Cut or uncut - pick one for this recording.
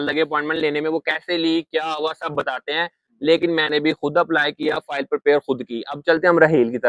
uncut